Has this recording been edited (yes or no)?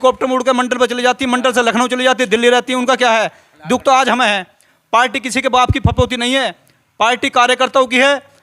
yes